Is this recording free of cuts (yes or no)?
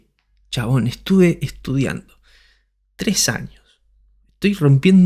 yes